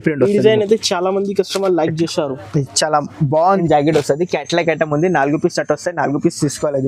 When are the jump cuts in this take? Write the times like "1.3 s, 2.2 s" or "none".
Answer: 3.6 s